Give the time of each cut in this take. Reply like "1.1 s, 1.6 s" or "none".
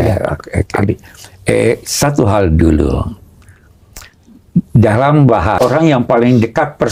5.6 s